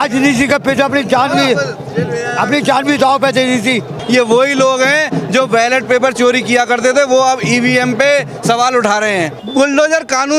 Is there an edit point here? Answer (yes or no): yes